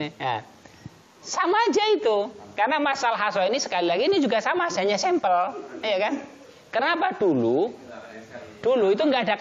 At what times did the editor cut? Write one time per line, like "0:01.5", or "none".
none